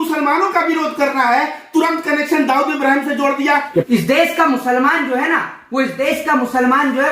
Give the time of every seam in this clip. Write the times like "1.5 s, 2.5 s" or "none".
3.7 s